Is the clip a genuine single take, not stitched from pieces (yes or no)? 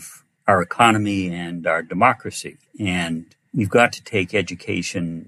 yes